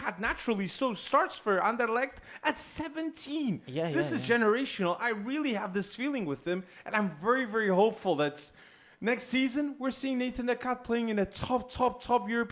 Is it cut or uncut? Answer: uncut